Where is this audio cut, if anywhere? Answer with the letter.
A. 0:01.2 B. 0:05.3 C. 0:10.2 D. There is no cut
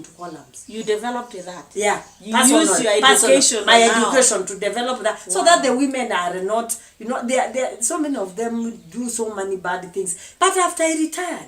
C